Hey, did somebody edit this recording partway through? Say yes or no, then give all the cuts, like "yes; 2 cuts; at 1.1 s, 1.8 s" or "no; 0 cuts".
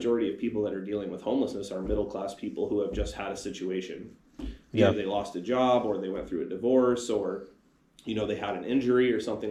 no; 0 cuts